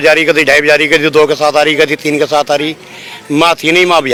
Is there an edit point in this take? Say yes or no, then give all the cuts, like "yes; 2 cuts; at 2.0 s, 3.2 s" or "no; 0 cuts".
no; 0 cuts